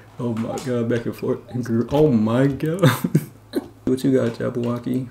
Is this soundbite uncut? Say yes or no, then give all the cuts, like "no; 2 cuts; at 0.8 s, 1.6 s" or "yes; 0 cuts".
no; 1 cut; at 3.9 s